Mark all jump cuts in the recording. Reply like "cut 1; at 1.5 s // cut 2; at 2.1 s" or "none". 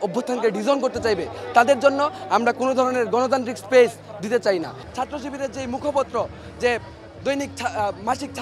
cut 1; at 4.8 s

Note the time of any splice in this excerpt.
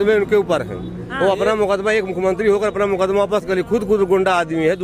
none

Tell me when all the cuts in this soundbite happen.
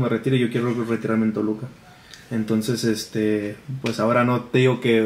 none

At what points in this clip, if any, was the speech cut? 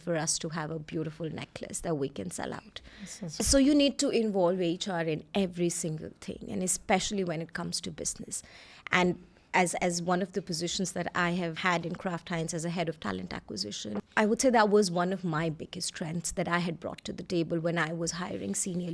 none

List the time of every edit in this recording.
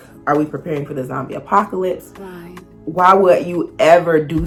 none

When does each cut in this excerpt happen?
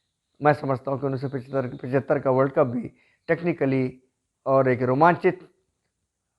none

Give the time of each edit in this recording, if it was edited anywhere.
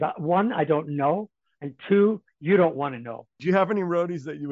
cut 1; at 3.4 s

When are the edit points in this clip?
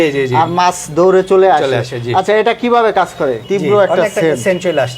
cut 1; at 3.4 s

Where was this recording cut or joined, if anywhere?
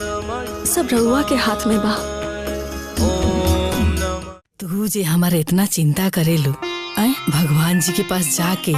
cut 1; at 4.1 s

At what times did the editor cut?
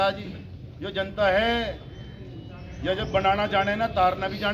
none

